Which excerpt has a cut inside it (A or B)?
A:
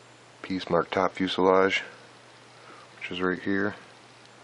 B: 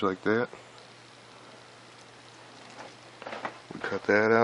B